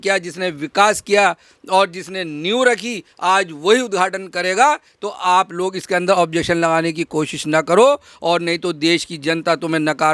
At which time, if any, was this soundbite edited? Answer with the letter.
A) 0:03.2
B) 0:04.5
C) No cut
C